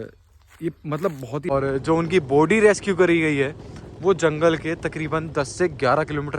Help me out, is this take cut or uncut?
cut